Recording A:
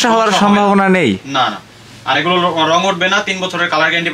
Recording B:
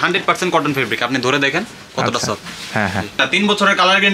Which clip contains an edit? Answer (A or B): B